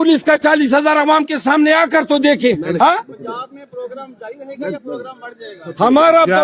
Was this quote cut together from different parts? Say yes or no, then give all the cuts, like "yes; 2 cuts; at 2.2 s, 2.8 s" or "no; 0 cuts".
yes; 1 cut; at 2.8 s